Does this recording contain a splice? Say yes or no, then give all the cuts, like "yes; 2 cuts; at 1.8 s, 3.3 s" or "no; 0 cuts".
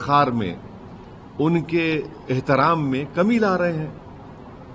no; 0 cuts